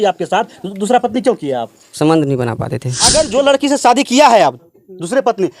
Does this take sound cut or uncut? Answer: cut